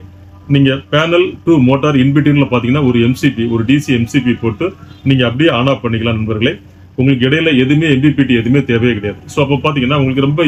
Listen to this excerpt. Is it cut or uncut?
uncut